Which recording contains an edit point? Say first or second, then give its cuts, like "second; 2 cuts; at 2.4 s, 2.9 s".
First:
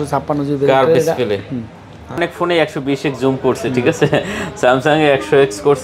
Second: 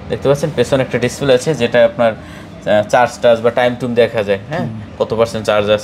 first; 1 cut; at 2.2 s